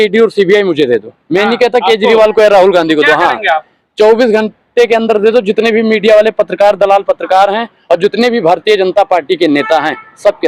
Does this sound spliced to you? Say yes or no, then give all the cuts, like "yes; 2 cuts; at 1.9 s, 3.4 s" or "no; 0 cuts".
no; 0 cuts